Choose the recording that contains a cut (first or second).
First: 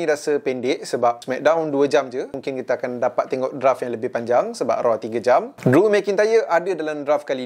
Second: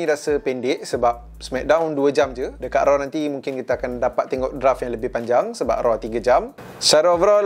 first